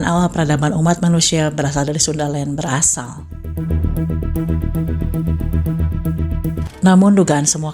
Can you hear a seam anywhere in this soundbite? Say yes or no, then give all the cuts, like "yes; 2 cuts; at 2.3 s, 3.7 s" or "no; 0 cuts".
yes; 1 cut; at 6.7 s